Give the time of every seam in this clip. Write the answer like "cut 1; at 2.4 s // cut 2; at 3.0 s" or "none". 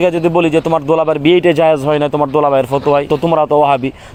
none